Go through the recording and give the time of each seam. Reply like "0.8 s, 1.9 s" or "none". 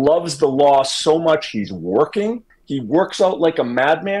none